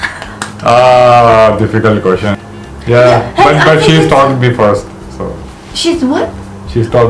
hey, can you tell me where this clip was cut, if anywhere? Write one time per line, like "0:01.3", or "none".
0:02.4